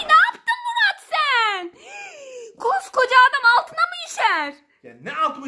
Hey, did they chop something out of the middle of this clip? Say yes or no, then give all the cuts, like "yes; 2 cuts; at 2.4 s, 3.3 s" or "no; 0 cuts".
no; 0 cuts